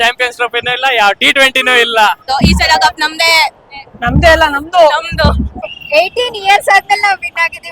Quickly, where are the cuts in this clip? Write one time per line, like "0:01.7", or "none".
0:02.2
0:05.6

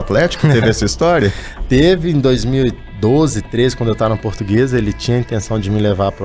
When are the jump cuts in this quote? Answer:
none

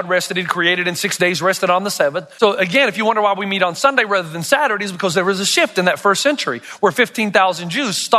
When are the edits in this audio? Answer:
0:02.3

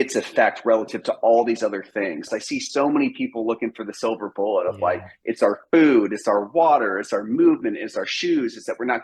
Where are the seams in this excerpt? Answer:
0:02.2

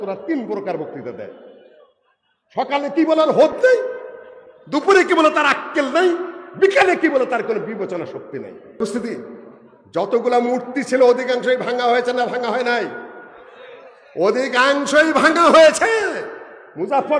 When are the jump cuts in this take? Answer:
0:08.8

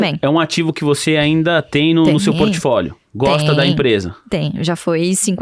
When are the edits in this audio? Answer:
none

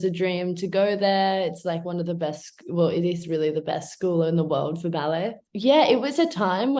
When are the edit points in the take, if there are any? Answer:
0:05.4

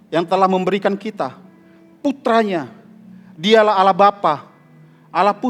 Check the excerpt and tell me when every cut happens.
none

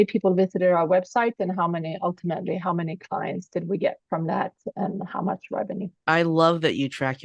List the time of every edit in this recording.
none

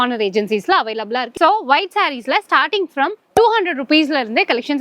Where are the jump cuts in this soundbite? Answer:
0:01.3

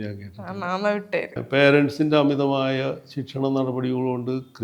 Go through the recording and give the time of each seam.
0:01.4

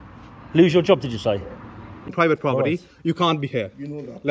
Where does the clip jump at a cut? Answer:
0:02.1

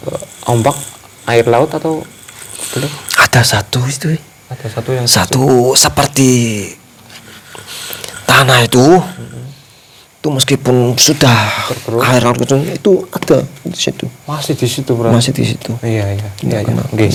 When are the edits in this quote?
none

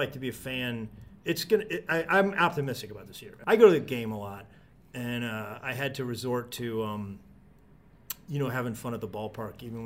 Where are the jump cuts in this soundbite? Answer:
0:01.1
0:03.3

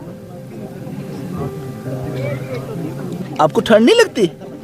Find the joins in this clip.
0:03.2

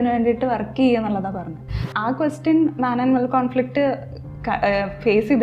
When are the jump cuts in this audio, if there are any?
0:01.8

